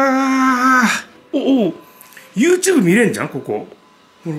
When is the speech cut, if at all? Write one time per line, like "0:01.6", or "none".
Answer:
0:01.1